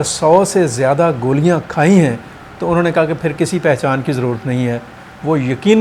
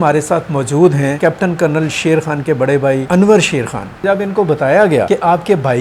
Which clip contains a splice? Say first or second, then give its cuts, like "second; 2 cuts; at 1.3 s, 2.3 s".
second; 4 cuts; at 1.1 s, 3.0 s, 4.0 s, 5.1 s